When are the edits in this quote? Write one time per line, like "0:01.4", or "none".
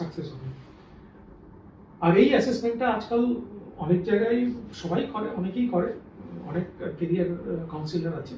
none